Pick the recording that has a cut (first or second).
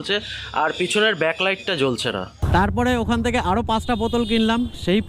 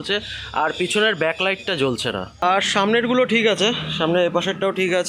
first